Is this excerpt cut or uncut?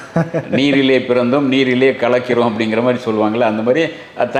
uncut